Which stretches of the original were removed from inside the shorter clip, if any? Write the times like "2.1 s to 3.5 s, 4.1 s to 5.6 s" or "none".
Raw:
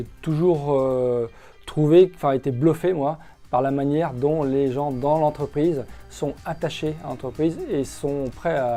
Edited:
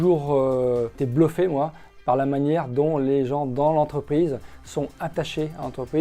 1.4 s to 2.5 s